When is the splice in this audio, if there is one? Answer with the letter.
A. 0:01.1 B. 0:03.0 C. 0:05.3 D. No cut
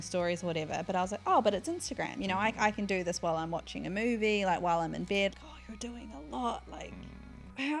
C